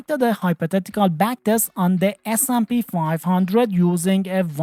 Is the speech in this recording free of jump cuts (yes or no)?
yes